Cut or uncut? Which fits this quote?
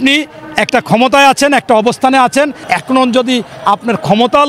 cut